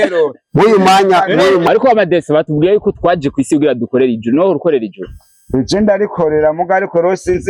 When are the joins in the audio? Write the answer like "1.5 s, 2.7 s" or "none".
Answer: 1.6 s